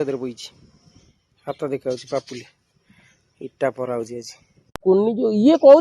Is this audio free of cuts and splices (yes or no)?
no